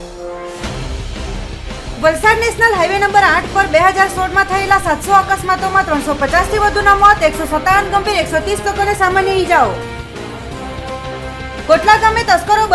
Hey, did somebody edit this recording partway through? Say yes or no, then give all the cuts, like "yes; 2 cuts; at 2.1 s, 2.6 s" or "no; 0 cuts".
yes; 1 cut; at 1.6 s